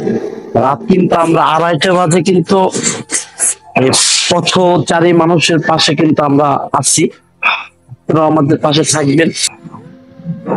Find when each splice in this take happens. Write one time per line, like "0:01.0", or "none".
0:09.4